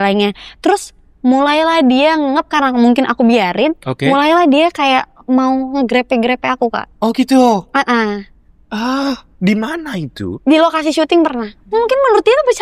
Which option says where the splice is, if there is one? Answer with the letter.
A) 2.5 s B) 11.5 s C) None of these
B